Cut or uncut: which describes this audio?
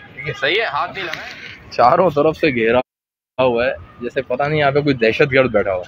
cut